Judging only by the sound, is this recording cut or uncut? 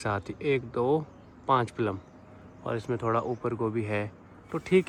uncut